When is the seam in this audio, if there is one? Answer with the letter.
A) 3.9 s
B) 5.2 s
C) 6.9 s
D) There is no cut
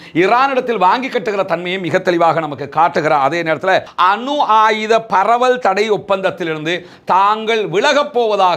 A